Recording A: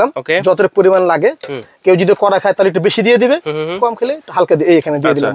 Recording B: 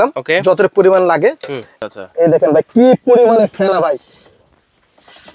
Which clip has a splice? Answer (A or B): B